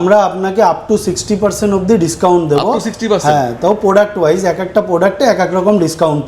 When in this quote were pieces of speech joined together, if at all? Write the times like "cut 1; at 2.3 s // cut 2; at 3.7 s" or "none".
none